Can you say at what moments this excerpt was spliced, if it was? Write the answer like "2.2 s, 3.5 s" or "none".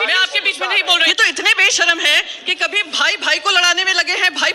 1.1 s